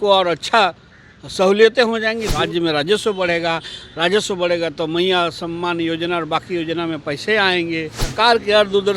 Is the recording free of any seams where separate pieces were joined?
no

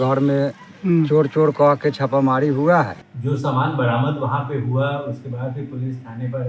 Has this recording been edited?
yes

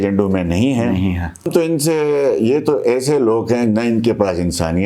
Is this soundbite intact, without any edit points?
no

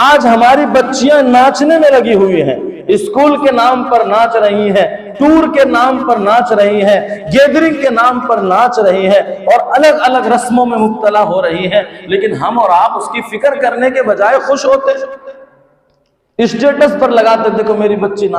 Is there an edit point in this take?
no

